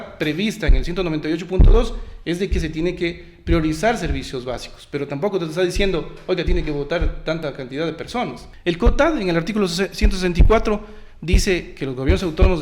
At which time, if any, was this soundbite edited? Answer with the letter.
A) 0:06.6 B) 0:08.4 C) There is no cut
B